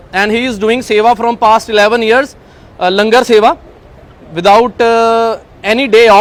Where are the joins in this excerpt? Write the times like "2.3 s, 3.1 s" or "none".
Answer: none

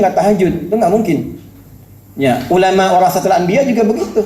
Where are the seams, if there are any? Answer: none

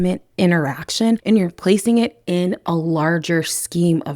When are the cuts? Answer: 1.2 s

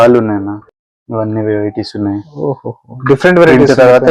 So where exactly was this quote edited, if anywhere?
none

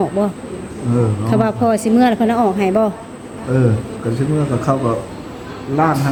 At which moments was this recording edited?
none

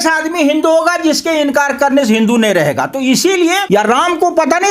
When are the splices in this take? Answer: 3.6 s

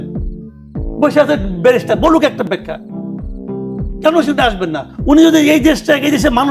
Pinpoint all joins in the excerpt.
none

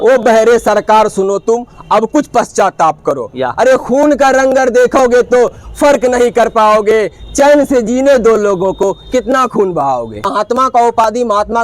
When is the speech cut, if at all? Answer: 10.2 s

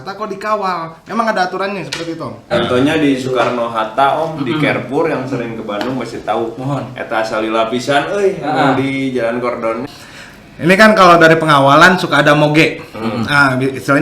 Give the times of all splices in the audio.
2.5 s, 9.9 s

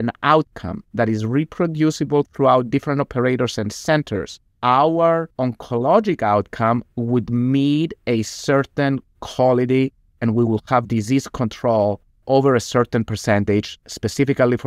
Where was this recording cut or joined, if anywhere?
5.3 s

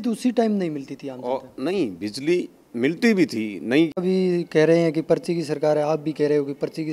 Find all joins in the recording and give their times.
4.0 s

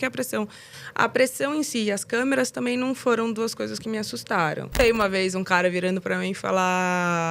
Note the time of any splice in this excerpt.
4.7 s

